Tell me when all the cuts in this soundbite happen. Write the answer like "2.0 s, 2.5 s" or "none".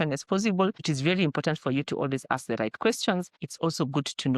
0.9 s, 3.4 s